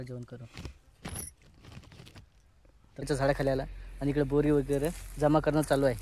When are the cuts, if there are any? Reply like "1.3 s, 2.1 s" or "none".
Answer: 3.1 s